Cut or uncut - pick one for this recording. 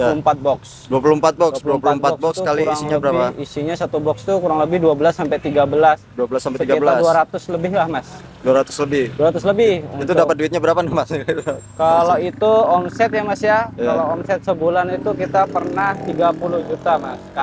uncut